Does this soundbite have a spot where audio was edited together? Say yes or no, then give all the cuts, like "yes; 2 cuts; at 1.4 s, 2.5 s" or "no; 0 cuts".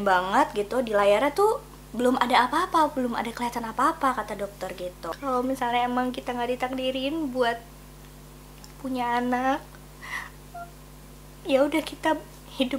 yes; 1 cut; at 5.0 s